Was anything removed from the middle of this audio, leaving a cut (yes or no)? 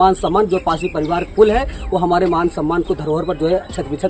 no